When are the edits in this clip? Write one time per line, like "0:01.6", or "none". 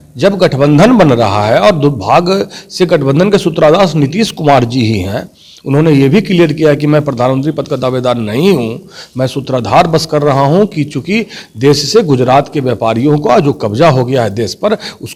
none